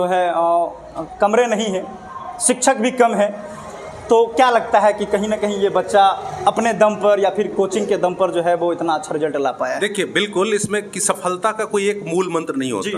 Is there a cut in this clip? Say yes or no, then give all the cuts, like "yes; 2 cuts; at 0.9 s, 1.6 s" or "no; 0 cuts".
no; 0 cuts